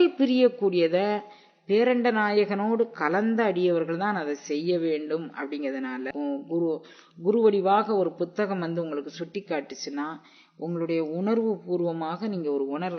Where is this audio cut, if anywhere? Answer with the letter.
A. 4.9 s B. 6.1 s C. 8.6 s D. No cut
B